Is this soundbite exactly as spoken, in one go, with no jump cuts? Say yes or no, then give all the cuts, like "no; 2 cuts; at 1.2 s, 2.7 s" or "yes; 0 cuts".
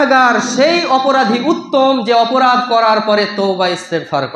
yes; 0 cuts